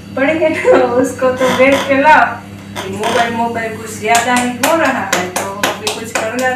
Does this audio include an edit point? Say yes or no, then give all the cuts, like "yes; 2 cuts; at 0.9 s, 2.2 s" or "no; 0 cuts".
yes; 1 cut; at 2.9 s